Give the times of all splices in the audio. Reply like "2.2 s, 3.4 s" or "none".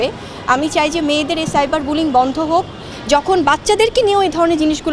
2.9 s